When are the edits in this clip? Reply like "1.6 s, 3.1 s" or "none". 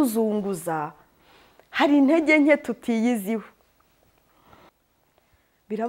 4.7 s

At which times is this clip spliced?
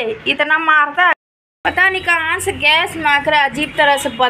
1.1 s

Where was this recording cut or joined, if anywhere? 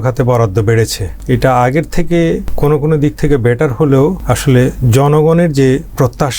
1.1 s, 2.5 s, 4.3 s

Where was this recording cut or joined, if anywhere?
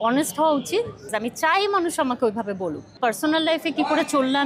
1.1 s, 2.9 s

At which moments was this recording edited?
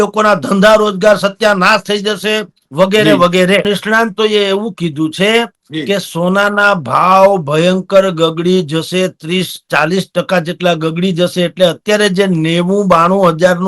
3.6 s

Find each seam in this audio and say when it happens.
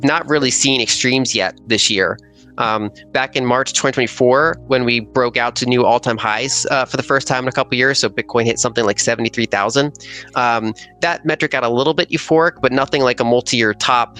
none

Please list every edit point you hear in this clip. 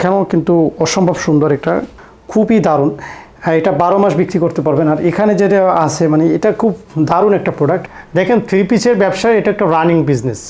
1.9 s, 7.8 s

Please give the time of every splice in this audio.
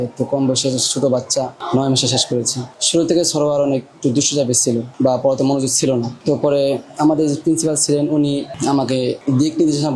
2.7 s

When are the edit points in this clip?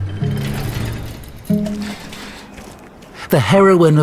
none

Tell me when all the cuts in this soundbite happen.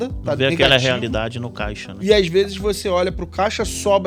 none

